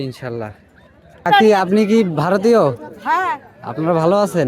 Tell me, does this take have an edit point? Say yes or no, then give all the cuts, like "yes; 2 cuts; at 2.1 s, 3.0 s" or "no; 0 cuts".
yes; 1 cut; at 1.3 s